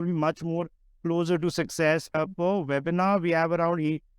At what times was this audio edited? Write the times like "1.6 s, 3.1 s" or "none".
2.2 s